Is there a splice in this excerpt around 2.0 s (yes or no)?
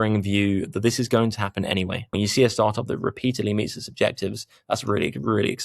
yes